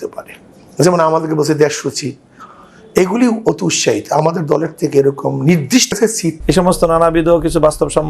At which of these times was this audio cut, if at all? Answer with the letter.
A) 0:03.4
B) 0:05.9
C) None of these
B